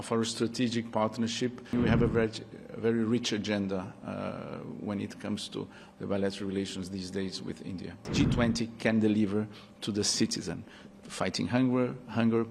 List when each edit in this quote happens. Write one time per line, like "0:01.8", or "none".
0:01.7
0:08.0